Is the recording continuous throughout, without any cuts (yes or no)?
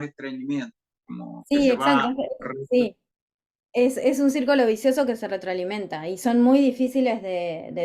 yes